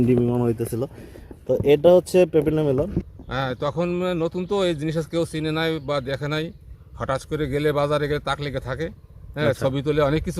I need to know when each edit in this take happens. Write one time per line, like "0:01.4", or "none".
0:03.0